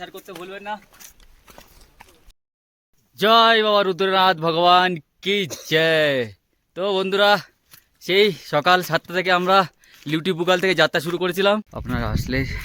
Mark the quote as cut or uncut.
cut